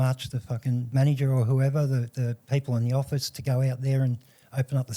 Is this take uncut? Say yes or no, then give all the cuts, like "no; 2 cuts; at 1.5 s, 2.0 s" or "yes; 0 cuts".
no; 2 cuts; at 0.9 s, 2.4 s